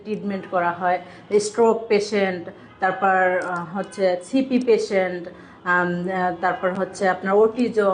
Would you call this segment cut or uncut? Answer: uncut